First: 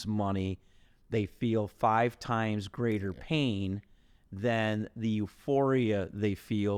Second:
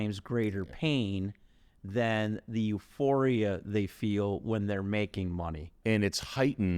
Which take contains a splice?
second; 1 cut; at 5.7 s

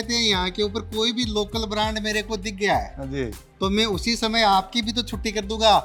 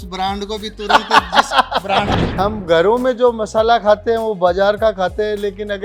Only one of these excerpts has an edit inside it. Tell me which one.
second; 1 cut; at 2.1 s

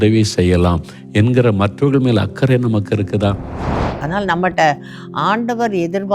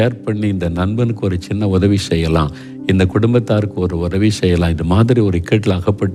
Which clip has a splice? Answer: first; 1 cut; at 3.9 s

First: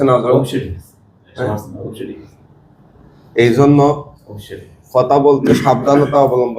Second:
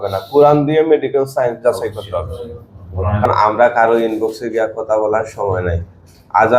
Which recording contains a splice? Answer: second; 1 cut; at 3.3 s

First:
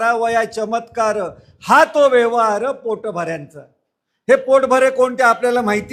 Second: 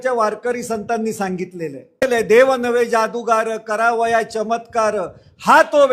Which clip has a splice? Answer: second; 1 cut; at 2.0 s

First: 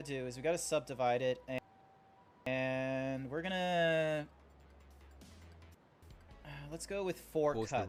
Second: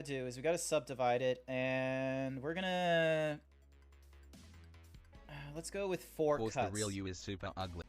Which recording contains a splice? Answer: second; 2 cuts; at 1.6 s, 5.0 s

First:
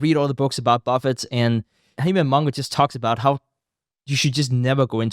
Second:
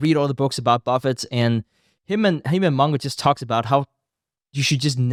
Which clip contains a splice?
first; 1 cut; at 2.0 s

